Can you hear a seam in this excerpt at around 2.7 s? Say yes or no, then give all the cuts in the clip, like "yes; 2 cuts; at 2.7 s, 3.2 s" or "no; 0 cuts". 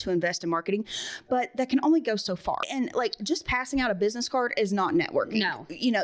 yes; 1 cut; at 2.7 s